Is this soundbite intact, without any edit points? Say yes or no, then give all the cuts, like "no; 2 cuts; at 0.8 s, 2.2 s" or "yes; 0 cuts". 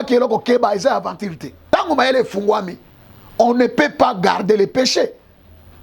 no; 1 cut; at 1.5 s